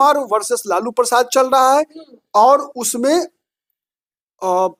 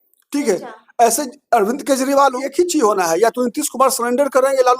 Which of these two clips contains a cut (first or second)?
second